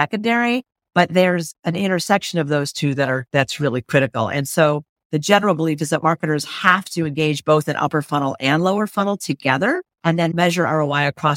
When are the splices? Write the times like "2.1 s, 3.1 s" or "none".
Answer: 10.3 s

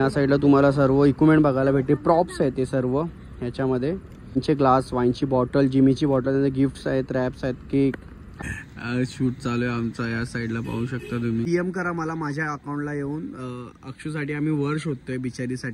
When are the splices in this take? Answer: 4.4 s, 8.3 s, 11.5 s

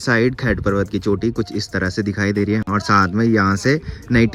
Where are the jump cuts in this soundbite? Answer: none

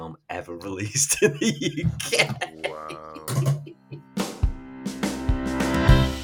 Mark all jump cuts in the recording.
4.1 s

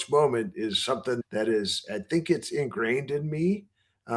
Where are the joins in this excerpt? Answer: 1.2 s

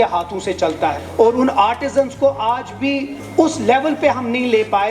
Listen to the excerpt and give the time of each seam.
1.0 s, 3.2 s

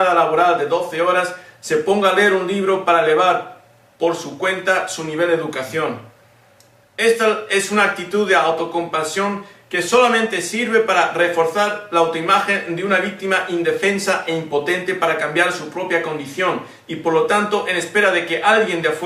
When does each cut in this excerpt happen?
14.4 s

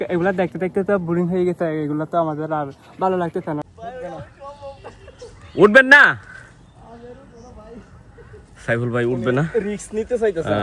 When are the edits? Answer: 3.6 s

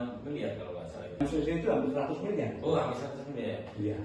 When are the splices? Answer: 1.2 s

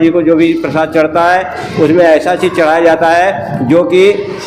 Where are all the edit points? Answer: none

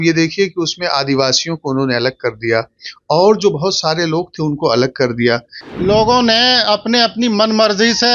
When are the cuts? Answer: 5.6 s

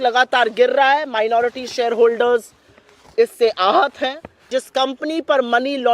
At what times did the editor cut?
4.4 s

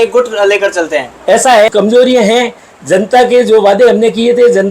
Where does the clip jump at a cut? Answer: 1.7 s

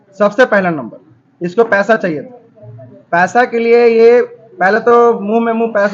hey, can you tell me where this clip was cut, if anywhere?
none

